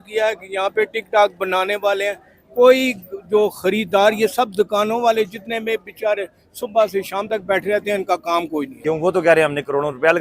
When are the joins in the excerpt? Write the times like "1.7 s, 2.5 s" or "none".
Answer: 8.7 s